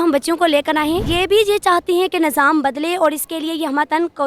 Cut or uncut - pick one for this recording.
cut